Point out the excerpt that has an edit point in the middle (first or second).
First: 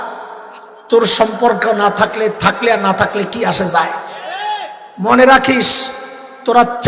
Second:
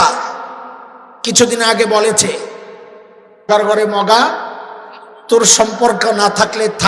second